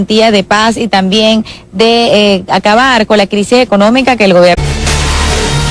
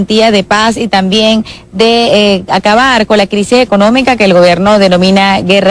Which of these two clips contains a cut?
second; 1 cut; at 4.6 s

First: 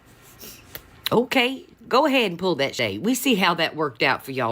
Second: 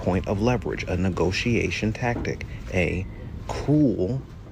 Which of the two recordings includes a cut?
first; 1 cut; at 2.7 s

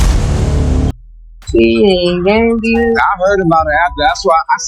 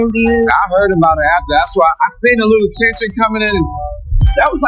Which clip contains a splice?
first; 1 cut; at 1.4 s

